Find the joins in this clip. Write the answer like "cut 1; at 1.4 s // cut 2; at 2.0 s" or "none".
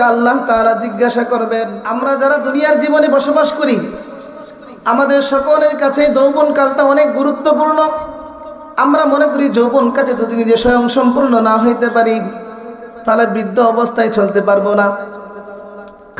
cut 1; at 1.8 s